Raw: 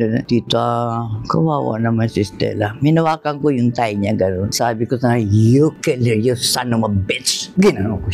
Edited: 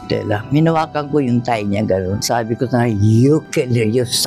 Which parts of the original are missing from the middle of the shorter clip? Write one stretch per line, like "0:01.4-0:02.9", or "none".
none